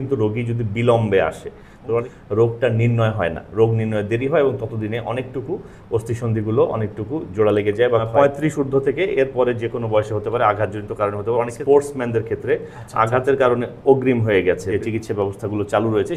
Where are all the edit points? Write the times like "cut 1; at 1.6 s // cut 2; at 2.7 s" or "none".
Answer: cut 1; at 2.1 s // cut 2; at 8.1 s // cut 3; at 11.5 s // cut 4; at 14.7 s